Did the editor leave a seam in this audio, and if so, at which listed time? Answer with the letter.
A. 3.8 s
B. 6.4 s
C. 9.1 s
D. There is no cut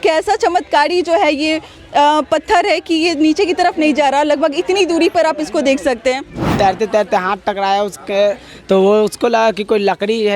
B